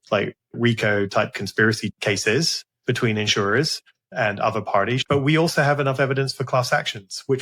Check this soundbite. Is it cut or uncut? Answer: cut